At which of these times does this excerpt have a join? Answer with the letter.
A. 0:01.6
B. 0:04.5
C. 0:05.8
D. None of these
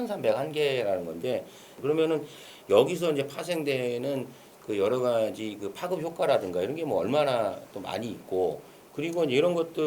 A